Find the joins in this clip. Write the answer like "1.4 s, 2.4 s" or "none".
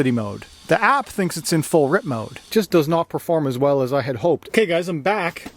2.4 s, 4.5 s